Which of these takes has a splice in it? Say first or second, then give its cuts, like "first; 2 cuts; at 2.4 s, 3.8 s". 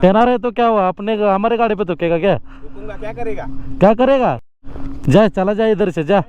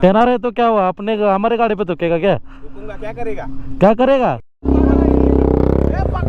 second; 1 cut; at 4.5 s